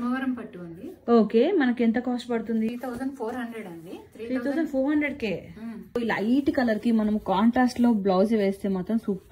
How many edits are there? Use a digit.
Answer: 2